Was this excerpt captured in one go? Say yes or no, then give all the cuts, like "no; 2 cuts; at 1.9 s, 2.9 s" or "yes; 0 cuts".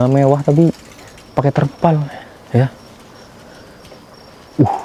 yes; 0 cuts